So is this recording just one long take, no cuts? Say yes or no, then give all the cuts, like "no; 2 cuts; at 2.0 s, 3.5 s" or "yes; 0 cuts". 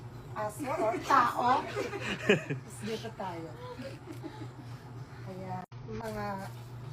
no; 1 cut; at 5.7 s